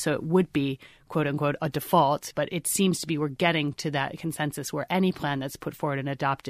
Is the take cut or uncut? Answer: cut